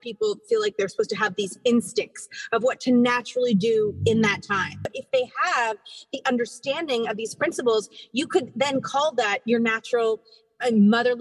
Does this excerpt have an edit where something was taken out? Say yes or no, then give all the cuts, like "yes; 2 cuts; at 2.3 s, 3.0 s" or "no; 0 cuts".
yes; 1 cut; at 4.9 s